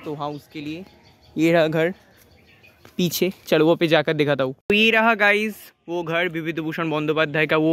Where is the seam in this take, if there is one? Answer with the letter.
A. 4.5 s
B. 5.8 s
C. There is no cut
A